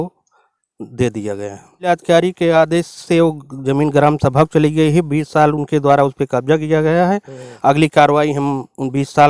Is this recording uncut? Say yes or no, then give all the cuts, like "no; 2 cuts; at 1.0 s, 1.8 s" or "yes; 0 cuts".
no; 1 cut; at 1.7 s